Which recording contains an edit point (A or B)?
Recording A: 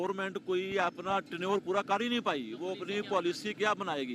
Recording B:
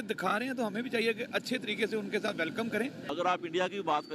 B